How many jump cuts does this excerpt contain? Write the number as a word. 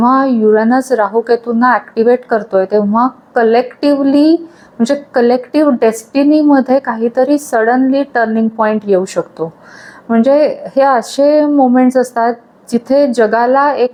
zero